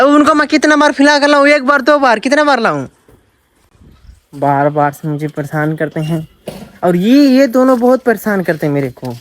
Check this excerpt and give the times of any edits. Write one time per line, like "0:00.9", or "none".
none

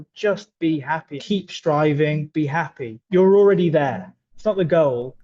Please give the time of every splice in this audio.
0:01.1
0:02.2
0:04.2

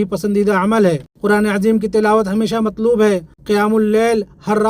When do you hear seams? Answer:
0:01.1
0:03.3

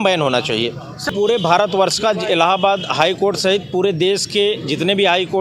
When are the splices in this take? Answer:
0:01.1

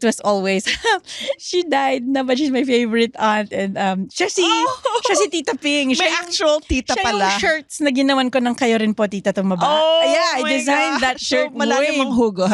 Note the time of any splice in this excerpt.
none

